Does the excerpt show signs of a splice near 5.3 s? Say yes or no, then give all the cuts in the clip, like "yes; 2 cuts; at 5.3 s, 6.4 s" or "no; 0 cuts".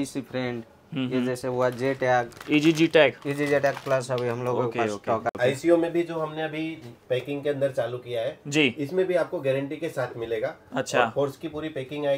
yes; 1 cut; at 5.3 s